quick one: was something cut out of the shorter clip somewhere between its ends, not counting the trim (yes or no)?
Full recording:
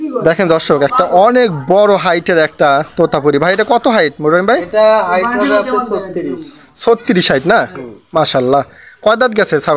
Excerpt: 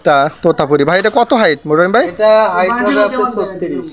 no